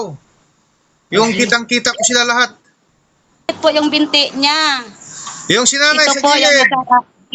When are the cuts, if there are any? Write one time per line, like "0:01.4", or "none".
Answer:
0:03.5